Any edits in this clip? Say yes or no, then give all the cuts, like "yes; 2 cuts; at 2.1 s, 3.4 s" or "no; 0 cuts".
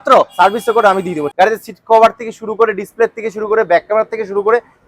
yes; 1 cut; at 1.3 s